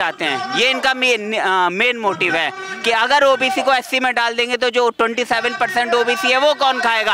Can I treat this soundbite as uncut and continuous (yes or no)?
yes